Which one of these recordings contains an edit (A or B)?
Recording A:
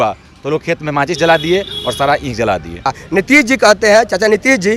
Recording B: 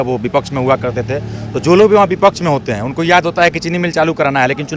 A